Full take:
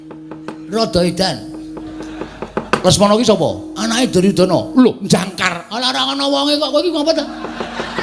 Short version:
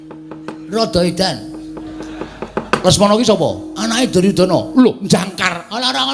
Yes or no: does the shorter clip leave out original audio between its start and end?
no